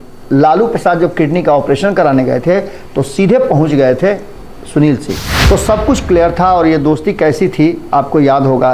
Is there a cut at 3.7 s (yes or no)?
no